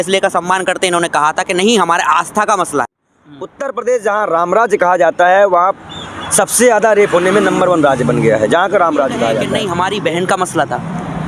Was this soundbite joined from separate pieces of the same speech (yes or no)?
yes